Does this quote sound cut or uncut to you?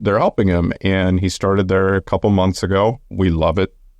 cut